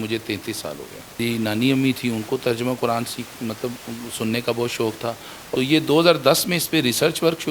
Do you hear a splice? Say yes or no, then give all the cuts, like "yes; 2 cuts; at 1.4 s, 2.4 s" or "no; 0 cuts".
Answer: yes; 2 cuts; at 1.2 s, 5.3 s